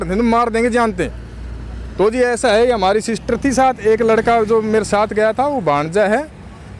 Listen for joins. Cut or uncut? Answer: uncut